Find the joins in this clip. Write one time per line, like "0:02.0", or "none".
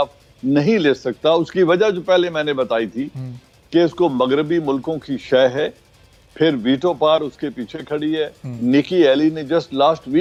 none

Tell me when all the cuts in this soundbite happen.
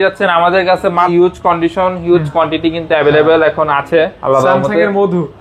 0:01.1

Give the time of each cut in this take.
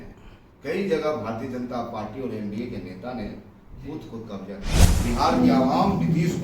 0:04.8

